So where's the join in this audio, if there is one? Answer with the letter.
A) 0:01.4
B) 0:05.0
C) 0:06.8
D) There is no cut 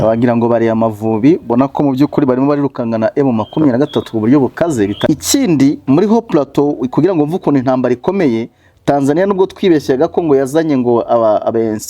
B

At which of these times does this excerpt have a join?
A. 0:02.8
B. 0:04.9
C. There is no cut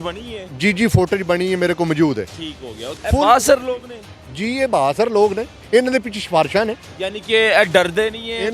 A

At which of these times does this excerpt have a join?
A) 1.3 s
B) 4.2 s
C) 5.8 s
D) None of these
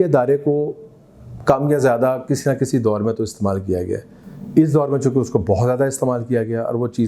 D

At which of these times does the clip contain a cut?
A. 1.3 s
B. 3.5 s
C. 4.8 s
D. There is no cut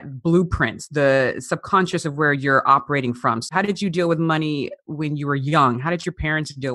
B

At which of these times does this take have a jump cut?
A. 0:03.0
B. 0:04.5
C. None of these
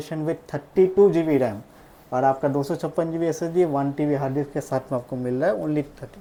C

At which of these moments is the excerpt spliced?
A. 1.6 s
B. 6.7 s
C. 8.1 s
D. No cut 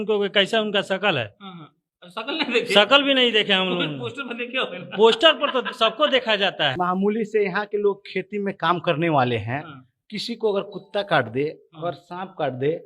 B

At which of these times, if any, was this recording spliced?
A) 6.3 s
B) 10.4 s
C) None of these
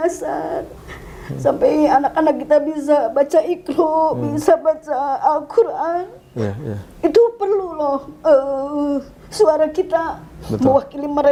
C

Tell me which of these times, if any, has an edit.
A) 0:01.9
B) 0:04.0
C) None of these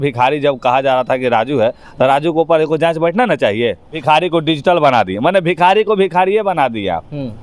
B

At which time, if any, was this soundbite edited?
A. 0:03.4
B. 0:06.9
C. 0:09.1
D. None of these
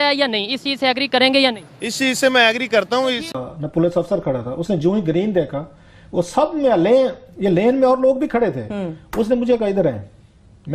A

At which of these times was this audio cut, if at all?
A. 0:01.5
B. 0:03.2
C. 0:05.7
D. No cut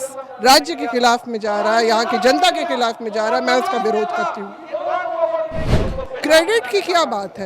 C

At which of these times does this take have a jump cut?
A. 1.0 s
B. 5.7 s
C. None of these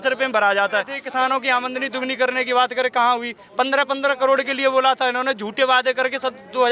A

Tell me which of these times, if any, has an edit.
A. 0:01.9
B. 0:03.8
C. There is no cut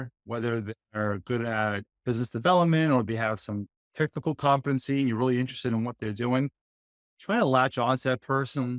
A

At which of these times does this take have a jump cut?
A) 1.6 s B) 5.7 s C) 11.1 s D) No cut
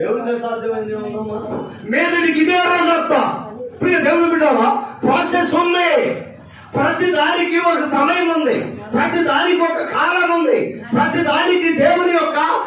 A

